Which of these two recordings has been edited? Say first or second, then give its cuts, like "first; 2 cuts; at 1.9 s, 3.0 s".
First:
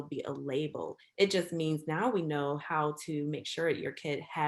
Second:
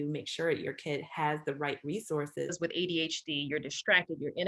second; 1 cut; at 2.5 s